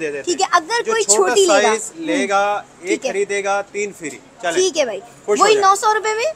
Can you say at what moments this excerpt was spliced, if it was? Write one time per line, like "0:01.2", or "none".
none